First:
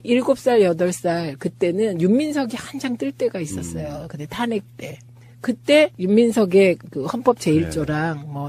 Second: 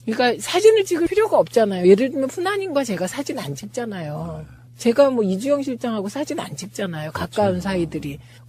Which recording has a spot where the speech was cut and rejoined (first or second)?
second